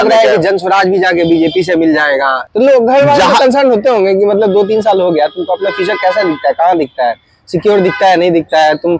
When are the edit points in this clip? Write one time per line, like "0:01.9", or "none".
0:02.4